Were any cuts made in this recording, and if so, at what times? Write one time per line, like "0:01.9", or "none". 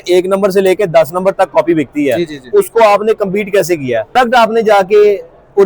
0:04.1